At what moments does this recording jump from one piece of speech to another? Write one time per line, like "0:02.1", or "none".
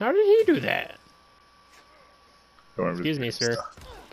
0:02.3